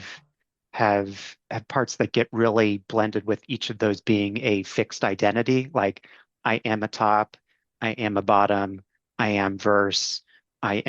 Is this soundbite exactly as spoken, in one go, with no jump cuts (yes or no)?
no